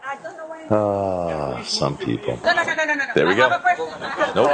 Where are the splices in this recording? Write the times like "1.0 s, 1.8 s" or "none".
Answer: 2.4 s